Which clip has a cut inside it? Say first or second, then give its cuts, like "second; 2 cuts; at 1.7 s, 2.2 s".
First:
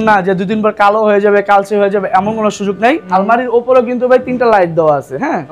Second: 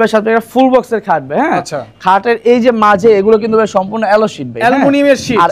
first; 1 cut; at 3.0 s